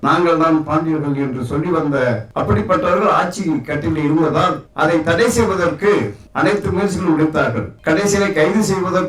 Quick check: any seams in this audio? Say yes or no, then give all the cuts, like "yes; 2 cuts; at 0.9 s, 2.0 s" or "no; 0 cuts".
no; 0 cuts